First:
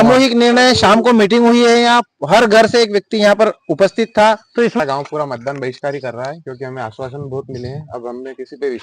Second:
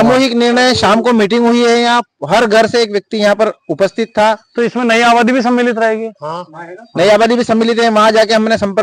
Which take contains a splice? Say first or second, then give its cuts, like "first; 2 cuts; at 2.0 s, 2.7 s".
first; 1 cut; at 4.8 s